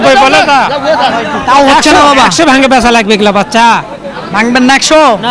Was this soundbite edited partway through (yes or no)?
no